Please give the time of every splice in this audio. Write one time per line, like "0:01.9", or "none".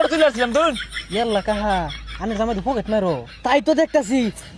0:00.9